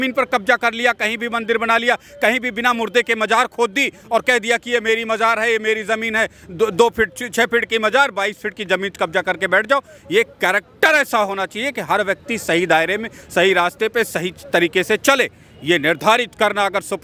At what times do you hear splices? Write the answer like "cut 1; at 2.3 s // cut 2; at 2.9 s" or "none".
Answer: none